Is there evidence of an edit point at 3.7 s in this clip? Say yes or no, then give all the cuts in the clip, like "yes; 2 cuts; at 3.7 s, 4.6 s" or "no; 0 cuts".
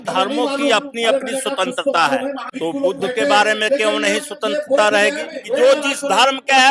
no; 2 cuts; at 2.5 s, 5.3 s